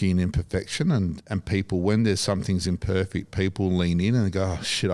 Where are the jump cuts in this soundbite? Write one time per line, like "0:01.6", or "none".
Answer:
none